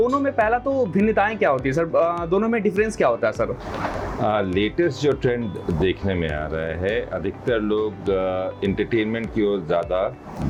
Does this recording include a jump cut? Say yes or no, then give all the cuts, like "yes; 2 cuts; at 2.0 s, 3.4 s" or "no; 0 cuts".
no; 0 cuts